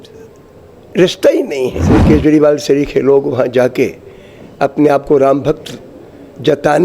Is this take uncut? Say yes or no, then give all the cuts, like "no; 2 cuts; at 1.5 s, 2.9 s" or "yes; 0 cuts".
no; 1 cut; at 1.9 s